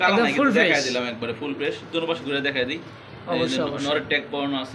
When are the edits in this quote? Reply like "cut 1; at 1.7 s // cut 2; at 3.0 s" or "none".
none